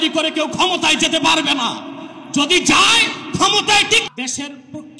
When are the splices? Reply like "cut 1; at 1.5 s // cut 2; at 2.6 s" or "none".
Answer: cut 1; at 4.1 s